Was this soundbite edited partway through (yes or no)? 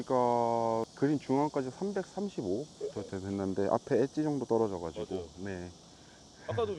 yes